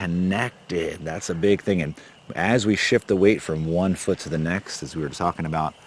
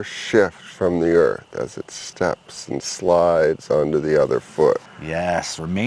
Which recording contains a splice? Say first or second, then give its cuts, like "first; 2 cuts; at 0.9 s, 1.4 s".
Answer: second; 1 cut; at 5.0 s